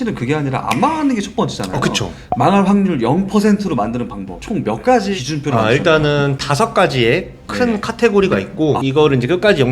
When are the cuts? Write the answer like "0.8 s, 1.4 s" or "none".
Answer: 8.8 s